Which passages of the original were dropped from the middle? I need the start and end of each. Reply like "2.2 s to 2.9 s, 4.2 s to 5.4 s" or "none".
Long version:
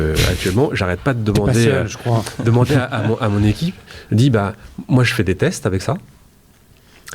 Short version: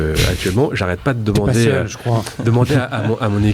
none